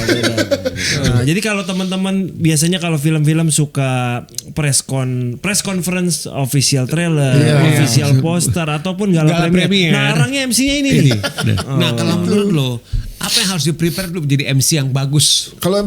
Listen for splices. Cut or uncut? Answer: cut